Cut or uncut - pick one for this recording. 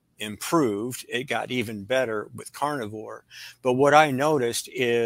uncut